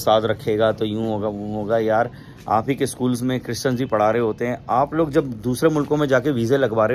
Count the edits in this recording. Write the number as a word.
zero